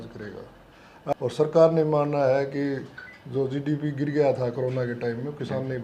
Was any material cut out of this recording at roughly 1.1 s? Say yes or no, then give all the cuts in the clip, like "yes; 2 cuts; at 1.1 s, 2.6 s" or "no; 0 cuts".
yes; 1 cut; at 1.1 s